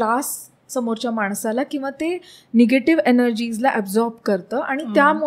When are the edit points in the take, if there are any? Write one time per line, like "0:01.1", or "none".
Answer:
none